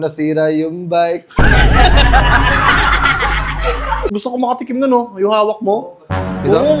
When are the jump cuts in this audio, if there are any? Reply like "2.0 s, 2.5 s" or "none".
4.1 s